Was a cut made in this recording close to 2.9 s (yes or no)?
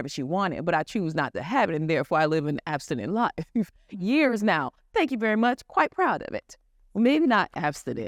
no